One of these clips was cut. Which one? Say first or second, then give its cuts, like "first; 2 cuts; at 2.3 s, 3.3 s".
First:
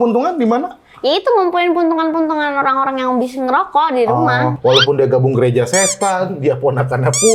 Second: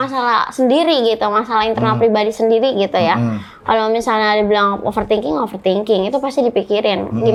first; 1 cut; at 4.5 s